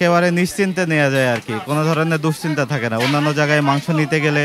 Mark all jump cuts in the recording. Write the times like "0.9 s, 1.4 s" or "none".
none